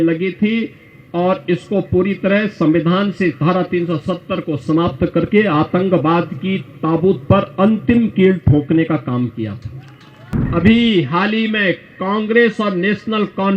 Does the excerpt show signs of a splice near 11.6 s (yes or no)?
no